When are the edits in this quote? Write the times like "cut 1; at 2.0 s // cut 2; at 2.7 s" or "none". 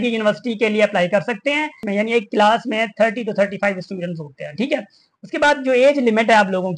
cut 1; at 1.8 s